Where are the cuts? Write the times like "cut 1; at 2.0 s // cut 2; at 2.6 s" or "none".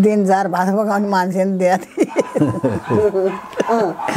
none